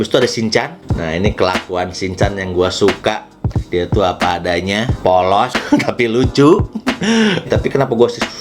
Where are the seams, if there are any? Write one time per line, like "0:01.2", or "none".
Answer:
0:00.9
0:07.5